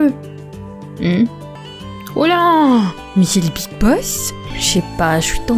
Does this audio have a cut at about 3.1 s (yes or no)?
no